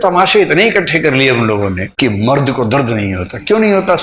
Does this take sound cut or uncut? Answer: uncut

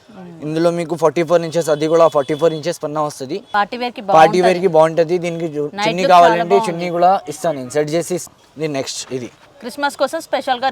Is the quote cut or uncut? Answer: cut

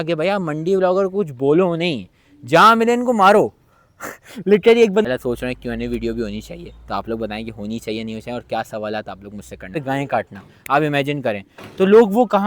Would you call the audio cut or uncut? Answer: cut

